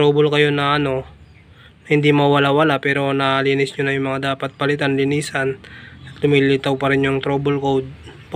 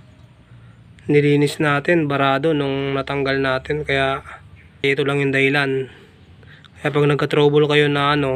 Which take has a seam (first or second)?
second